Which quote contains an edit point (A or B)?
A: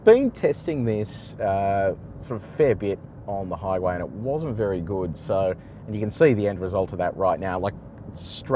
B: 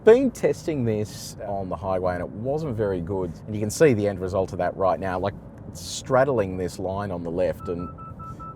B